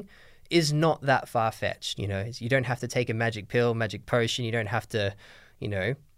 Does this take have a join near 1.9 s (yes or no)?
yes